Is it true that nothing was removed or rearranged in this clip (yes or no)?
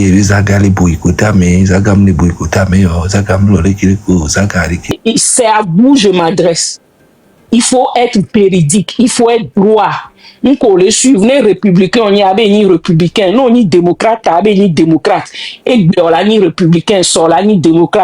no